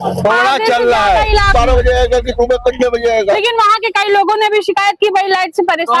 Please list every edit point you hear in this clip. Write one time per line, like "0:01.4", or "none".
0:01.5